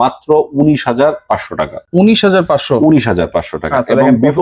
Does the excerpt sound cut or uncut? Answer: uncut